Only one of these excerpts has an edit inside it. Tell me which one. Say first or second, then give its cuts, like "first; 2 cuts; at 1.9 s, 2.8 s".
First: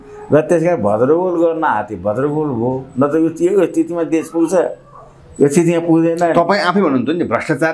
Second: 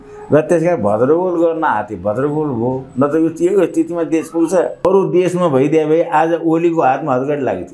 second; 1 cut; at 4.8 s